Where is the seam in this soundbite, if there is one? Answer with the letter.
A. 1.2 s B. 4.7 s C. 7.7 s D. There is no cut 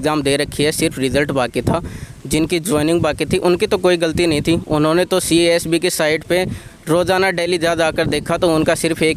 D